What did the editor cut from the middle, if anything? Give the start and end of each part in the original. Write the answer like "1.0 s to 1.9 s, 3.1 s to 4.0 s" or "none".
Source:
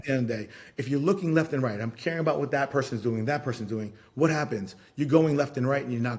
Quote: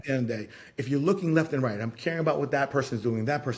none